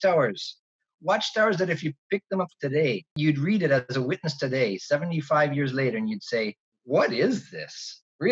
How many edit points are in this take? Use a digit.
2